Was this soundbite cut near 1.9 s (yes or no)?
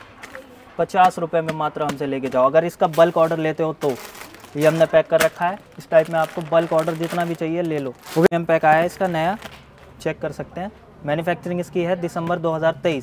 no